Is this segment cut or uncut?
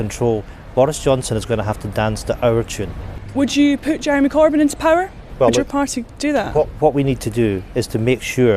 cut